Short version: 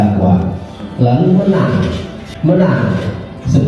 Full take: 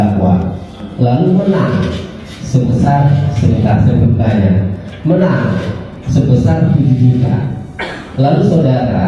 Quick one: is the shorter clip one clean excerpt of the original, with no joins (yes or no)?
no